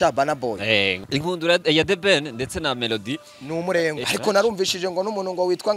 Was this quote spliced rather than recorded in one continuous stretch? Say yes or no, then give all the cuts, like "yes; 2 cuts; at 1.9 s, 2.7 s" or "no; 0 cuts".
yes; 2 cuts; at 1.0 s, 4.1 s